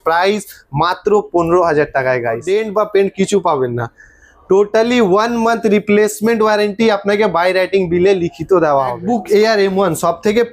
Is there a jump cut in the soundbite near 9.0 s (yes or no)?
yes